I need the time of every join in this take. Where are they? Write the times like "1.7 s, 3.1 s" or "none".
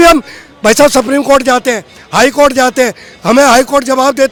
none